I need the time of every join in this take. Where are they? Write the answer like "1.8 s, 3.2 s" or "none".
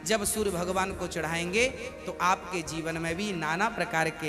none